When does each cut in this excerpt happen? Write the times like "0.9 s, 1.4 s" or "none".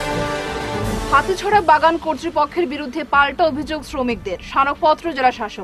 1.0 s